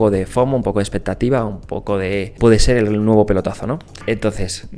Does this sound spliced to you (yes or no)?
yes